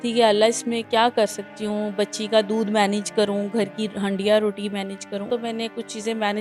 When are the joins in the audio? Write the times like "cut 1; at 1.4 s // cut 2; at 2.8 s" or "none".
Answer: cut 1; at 5.3 s